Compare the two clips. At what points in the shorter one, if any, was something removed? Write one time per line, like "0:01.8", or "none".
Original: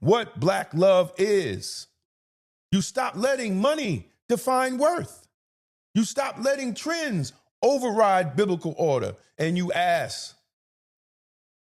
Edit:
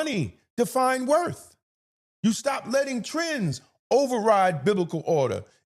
none